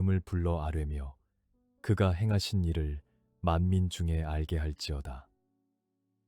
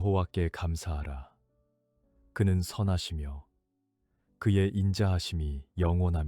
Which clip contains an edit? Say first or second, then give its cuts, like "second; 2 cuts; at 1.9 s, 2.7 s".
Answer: first; 1 cut; at 5.3 s